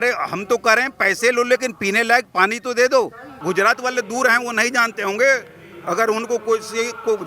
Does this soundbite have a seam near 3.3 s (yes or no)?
yes